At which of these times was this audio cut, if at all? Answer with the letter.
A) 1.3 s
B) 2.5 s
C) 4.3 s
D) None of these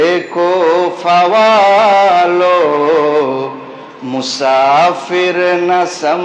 D